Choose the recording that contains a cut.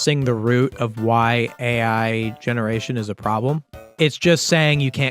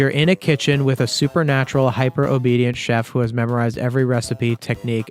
first; 1 cut; at 3.8 s

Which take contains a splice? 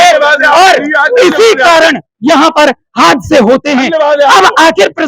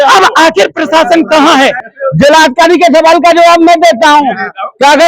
second; 1 cut; at 1.9 s

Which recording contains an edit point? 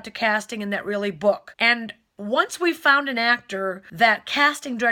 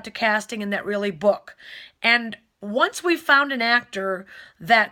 first; 2 cuts; at 1.5 s, 3.8 s

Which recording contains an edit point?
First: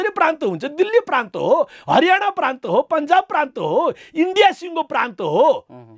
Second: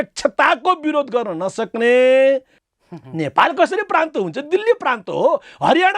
second; 1 cut; at 2.5 s

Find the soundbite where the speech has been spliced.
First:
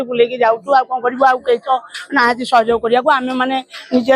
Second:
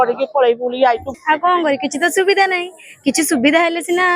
second; 1 cut; at 1.1 s

